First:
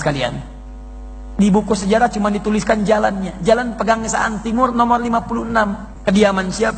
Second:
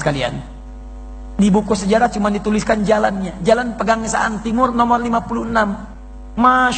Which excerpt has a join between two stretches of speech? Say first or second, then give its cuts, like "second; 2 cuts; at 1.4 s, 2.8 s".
first; 1 cut; at 5.9 s